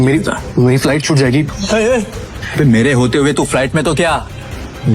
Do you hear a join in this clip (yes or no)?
yes